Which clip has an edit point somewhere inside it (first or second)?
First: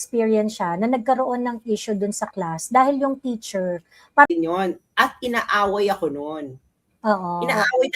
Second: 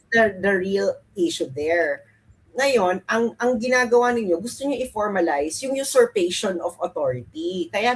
first